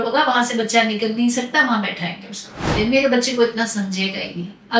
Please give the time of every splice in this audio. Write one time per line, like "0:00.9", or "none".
0:02.7